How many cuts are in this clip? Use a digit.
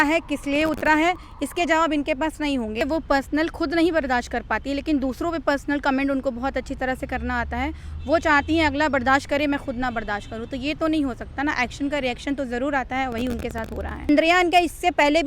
2